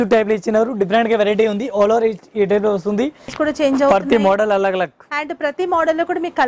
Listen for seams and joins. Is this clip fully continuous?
no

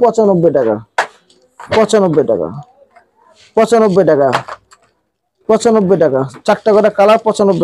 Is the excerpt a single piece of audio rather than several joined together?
yes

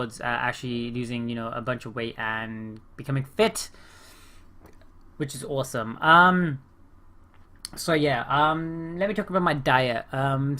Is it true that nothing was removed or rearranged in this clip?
yes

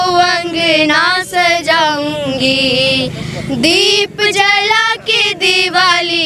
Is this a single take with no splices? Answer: yes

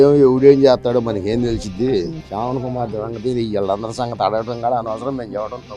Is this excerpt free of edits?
yes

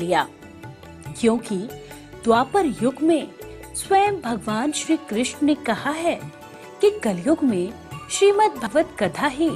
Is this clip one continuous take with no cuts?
no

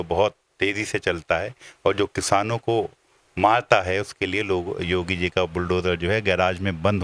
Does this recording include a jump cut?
no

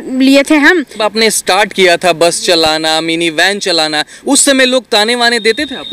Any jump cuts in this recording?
yes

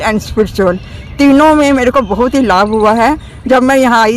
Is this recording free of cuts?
yes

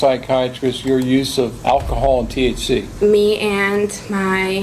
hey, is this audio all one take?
no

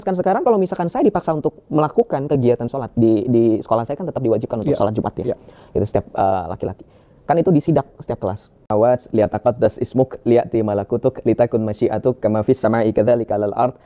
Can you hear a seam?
yes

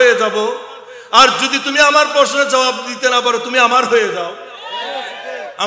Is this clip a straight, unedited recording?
yes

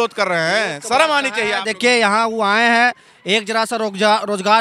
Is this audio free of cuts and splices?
yes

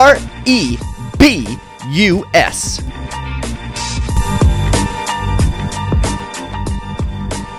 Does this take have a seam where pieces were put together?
yes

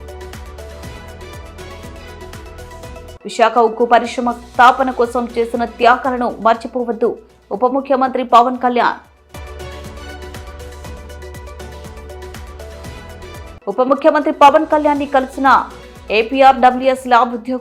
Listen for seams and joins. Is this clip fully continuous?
no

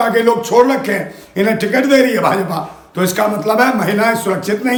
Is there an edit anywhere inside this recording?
no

